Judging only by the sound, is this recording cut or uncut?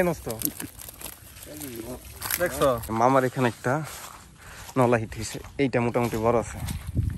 cut